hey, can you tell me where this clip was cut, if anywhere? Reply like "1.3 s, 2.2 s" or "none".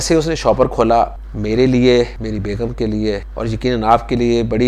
1.3 s, 2.2 s, 3.3 s